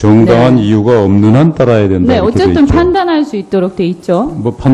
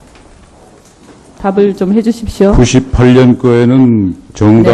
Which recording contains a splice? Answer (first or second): second